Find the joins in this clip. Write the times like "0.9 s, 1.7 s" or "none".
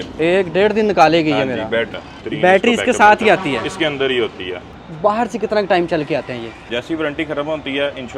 2.2 s, 4.8 s, 6.7 s